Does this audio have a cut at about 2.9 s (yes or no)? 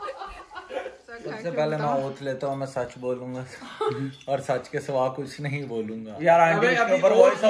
no